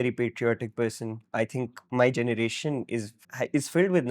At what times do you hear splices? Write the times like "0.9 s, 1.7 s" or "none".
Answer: 3.2 s